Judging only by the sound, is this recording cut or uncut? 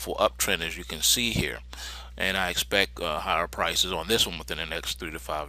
cut